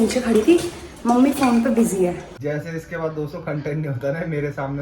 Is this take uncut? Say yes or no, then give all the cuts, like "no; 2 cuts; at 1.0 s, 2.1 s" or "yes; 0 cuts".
no; 1 cut; at 2.3 s